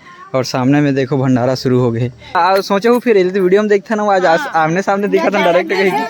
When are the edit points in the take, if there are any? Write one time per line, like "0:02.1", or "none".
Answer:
0:02.3